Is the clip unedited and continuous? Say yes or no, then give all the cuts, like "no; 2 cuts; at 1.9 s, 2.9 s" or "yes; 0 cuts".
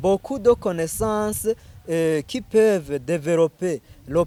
yes; 0 cuts